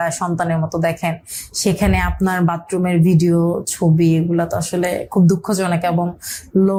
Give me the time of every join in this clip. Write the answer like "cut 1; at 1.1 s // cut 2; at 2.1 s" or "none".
none